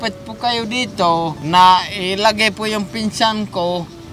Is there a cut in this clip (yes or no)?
yes